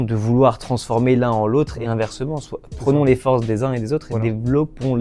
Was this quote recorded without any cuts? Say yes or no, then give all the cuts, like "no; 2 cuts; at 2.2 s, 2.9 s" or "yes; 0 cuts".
no; 1 cut; at 4.1 s